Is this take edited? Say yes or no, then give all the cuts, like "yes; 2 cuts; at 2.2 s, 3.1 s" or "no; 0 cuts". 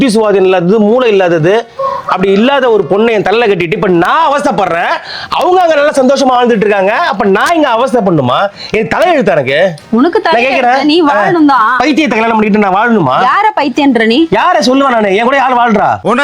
no; 0 cuts